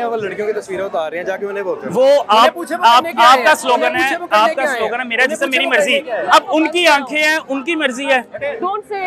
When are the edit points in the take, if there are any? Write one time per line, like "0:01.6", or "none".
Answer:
none